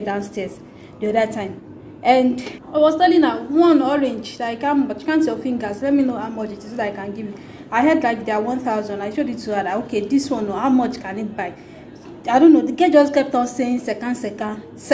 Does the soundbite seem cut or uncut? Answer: cut